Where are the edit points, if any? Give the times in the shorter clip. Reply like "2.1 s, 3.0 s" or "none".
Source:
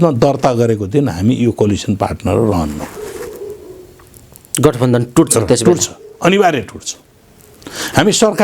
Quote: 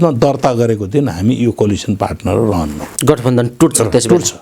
2.9 s